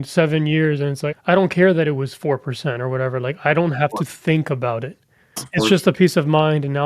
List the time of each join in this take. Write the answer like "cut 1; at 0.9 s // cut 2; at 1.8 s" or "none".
cut 1; at 1.0 s // cut 2; at 5.4 s